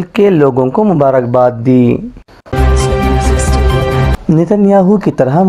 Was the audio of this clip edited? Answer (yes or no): yes